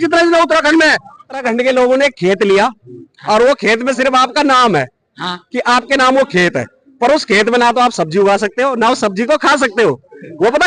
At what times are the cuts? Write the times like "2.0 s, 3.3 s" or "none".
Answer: 1.4 s